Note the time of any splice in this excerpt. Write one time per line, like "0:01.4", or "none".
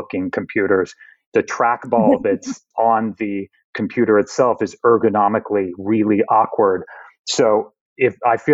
0:01.2
0:02.7